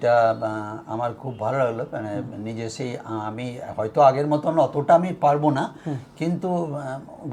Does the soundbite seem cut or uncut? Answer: uncut